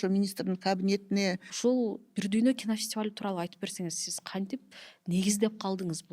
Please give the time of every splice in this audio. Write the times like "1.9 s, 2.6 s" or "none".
1.5 s